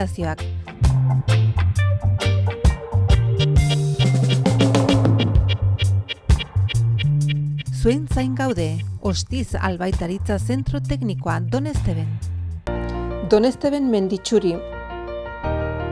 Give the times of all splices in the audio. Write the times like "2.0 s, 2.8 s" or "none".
12.7 s